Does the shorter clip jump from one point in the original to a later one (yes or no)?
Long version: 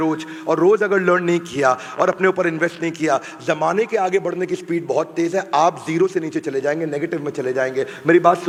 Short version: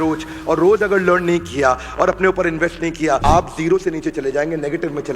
yes